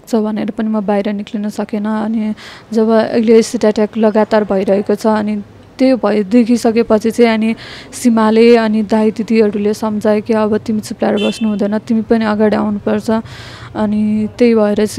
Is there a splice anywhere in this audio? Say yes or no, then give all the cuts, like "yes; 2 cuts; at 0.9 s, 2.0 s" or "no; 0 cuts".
no; 0 cuts